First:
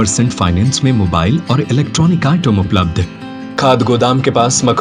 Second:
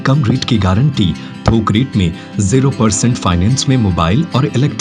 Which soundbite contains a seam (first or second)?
first